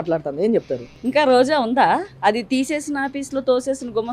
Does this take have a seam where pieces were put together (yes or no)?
no